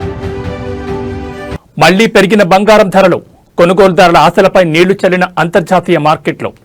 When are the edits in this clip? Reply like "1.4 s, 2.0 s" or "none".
1.6 s

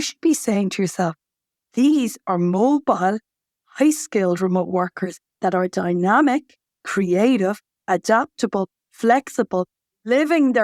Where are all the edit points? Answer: none

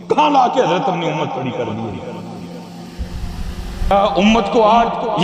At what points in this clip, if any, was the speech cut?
3.9 s

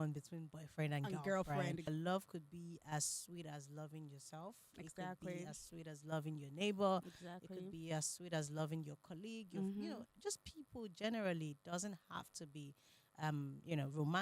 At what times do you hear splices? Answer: 1.9 s

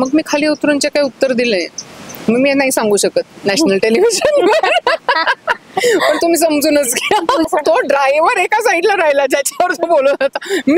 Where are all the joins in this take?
7.5 s

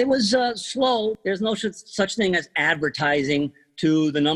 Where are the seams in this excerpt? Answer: 1.2 s

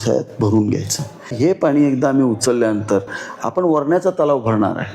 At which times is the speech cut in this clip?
1.3 s

